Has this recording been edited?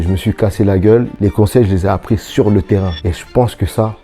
yes; 1 cut; at 3.0 s

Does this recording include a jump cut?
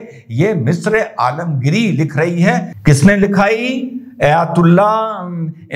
yes; 1 cut; at 2.7 s

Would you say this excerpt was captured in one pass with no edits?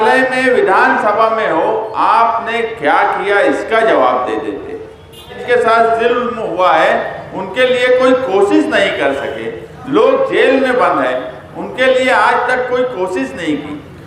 no; 1 cut; at 5.4 s

